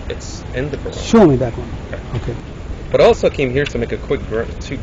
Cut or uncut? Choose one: cut